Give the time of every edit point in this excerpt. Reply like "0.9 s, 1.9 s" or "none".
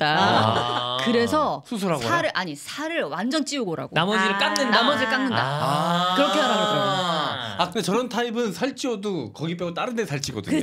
7.7 s